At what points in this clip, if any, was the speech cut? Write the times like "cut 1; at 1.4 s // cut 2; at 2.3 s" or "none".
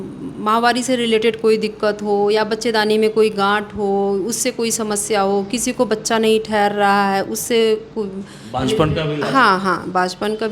none